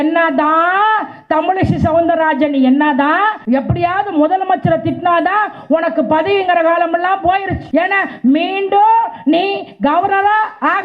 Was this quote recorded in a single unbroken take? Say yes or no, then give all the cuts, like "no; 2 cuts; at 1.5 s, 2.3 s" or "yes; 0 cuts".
no; 2 cuts; at 3.4 s, 7.6 s